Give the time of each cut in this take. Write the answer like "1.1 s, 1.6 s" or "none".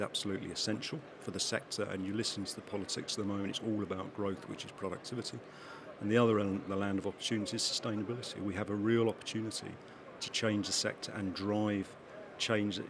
none